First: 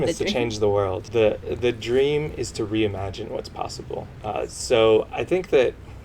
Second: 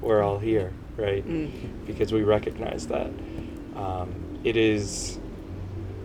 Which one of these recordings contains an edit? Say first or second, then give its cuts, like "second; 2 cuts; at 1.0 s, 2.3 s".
first; 2 cuts; at 1.0 s, 4.1 s